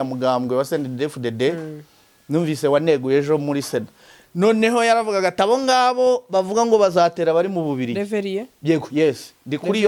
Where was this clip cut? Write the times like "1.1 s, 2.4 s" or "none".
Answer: none